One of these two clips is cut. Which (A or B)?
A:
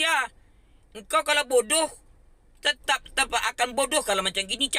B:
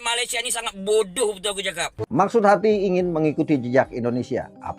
B